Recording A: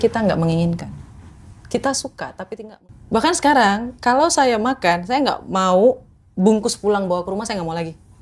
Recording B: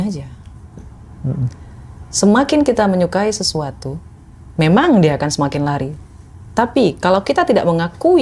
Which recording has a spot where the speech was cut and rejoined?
A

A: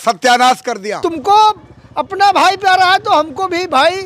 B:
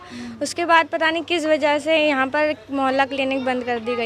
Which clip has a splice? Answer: A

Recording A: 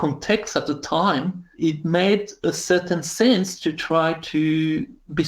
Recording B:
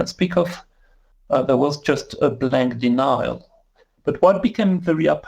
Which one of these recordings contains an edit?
A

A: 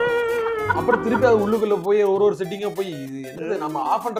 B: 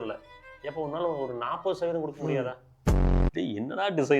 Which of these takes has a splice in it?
B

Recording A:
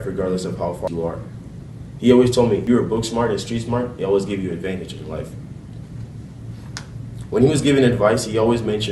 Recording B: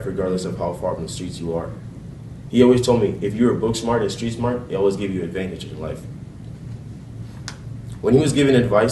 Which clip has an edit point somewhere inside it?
A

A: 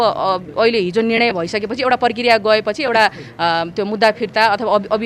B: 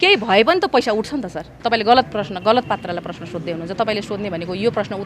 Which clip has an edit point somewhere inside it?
B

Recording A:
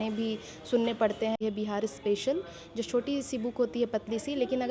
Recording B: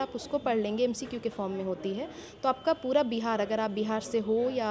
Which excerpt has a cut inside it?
A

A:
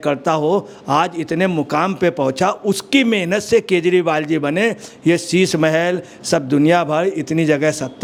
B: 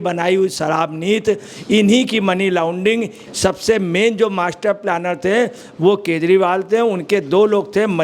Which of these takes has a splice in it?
B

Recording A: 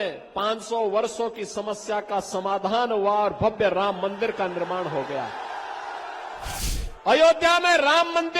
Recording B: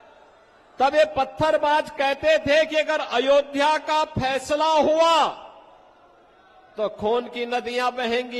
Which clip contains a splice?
A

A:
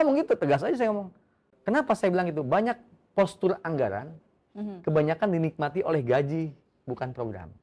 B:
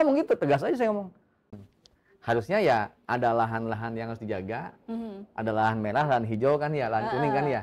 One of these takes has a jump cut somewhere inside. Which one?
B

